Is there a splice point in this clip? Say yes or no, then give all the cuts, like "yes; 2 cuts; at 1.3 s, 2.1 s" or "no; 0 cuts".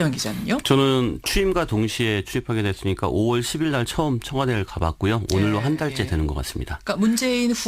yes; 1 cut; at 4.9 s